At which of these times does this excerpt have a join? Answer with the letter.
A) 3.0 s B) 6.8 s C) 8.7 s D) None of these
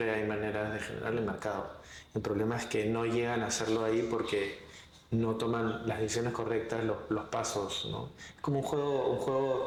D